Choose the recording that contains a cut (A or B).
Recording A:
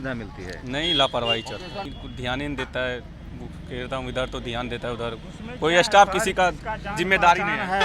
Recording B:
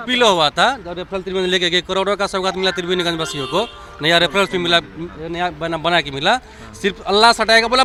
A